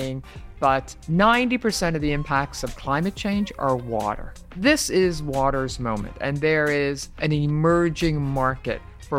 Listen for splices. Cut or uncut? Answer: cut